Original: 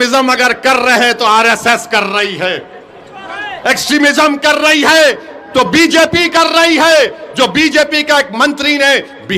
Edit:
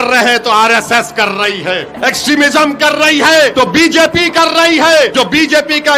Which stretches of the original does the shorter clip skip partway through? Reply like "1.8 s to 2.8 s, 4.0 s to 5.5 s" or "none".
2.7 s to 3.5 s, 5.1 s to 5.5 s, 7.1 s to 7.3 s